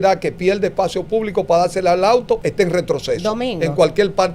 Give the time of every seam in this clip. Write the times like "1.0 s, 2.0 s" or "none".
2.5 s